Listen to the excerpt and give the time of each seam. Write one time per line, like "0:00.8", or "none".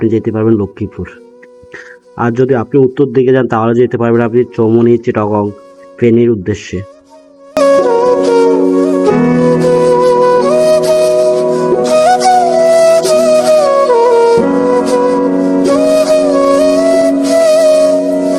none